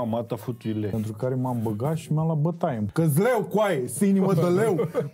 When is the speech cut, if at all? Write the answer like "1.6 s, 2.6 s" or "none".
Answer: 0.9 s, 2.9 s